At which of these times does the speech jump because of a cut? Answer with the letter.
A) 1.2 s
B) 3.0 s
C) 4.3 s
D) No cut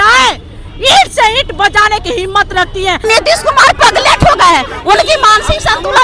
B